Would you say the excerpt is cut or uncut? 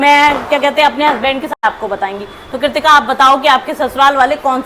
cut